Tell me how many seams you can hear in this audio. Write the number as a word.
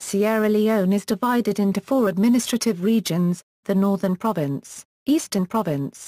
one